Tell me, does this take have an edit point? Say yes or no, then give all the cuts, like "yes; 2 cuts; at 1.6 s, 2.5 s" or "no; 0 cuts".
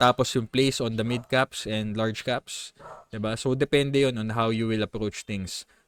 no; 0 cuts